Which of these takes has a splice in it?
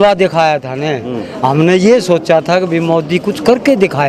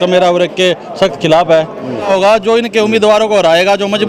second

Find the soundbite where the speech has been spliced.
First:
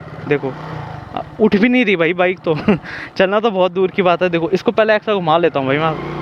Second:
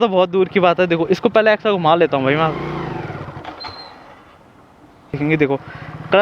second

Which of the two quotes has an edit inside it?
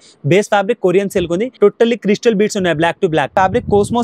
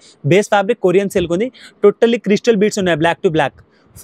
first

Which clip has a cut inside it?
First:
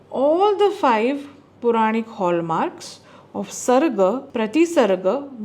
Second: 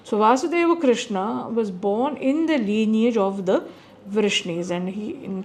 first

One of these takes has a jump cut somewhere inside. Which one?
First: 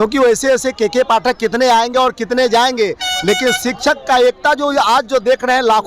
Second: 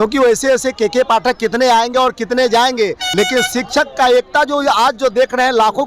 second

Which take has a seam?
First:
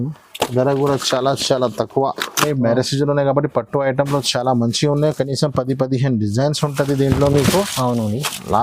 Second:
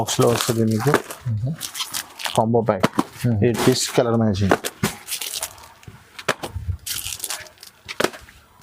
first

